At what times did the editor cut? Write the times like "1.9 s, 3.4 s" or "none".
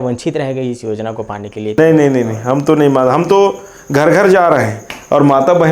1.8 s